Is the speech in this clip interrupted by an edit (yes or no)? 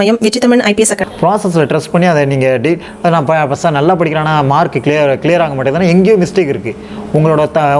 yes